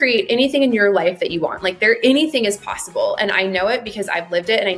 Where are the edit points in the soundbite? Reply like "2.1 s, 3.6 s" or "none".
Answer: none